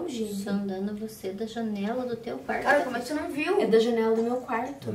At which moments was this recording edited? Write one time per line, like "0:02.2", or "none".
none